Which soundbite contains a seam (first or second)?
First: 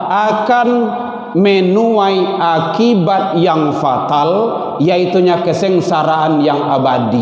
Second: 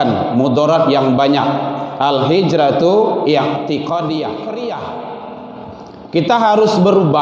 second